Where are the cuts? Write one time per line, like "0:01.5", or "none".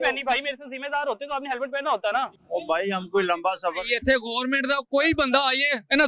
0:02.3